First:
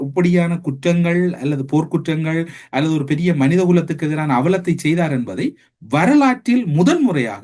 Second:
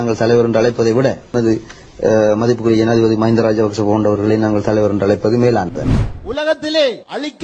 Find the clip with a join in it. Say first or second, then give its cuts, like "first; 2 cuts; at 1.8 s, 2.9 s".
second; 2 cuts; at 1.3 s, 6.1 s